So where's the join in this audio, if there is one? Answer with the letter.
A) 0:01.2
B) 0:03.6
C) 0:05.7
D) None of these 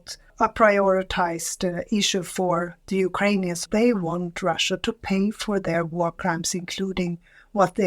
B